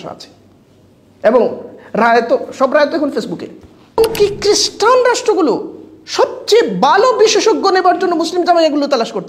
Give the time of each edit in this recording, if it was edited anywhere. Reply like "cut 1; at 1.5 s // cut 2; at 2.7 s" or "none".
cut 1; at 4.0 s

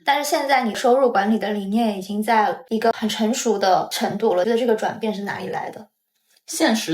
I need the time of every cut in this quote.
cut 1; at 0.8 s // cut 2; at 2.6 s // cut 3; at 4.4 s

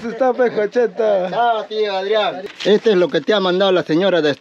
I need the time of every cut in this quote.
cut 1; at 2.5 s

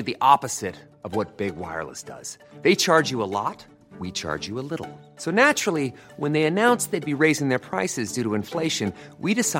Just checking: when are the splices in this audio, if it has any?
none

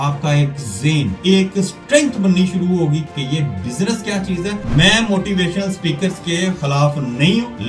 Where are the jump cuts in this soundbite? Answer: cut 1; at 1.2 s // cut 2; at 3.1 s // cut 3; at 4.6 s

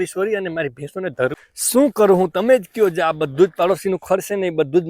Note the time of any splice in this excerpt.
cut 1; at 1.3 s

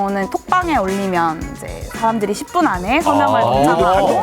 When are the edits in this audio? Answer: none

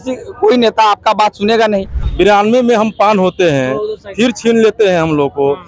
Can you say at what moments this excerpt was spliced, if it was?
cut 1; at 2.0 s

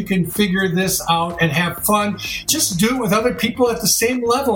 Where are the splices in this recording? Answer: none

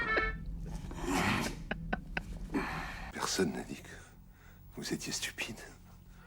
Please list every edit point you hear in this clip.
cut 1; at 3.0 s

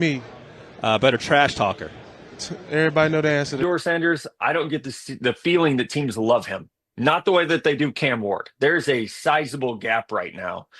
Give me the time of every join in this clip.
cut 1; at 3.6 s

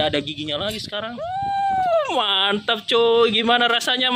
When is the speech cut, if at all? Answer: cut 1; at 1.1 s

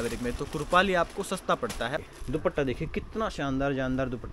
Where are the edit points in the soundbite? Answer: cut 1; at 2.0 s

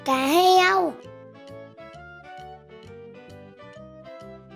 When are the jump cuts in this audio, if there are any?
cut 1; at 1.0 s

